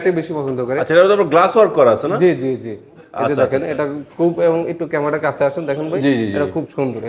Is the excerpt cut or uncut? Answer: uncut